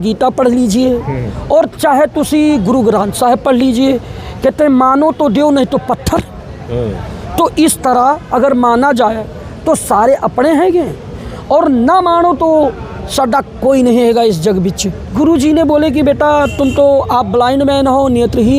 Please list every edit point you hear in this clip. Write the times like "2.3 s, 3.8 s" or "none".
15.0 s